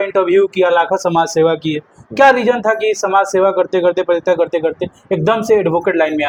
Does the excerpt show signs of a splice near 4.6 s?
no; 0 cuts

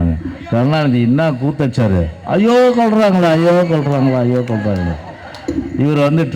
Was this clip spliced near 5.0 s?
no; 0 cuts

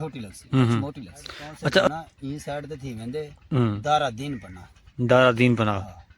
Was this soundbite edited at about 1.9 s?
yes; 1 cut; at 1.9 s

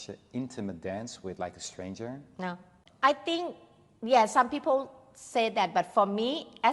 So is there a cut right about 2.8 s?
yes; 1 cut; at 2.8 s

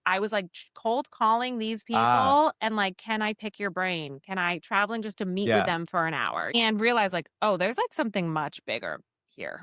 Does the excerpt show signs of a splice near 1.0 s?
no; 1 cut; at 6.5 s

